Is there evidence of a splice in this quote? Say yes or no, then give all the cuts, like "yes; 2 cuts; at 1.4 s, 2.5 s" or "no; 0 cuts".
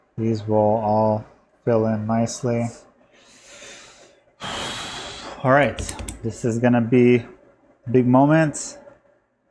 yes; 1 cut; at 3.0 s